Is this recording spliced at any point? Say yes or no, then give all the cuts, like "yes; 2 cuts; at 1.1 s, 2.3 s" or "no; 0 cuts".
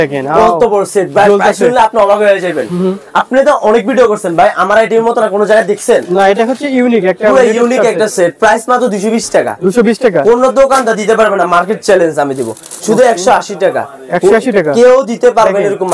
no; 0 cuts